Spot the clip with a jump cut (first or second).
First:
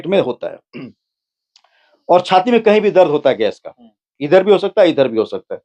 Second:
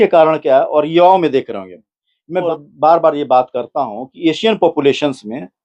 second